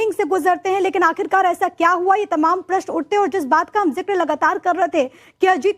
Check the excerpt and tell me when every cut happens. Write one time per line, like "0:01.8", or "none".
0:04.6